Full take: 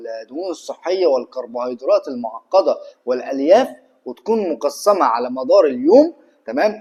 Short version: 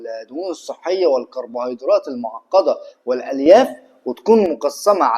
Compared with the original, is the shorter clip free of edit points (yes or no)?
yes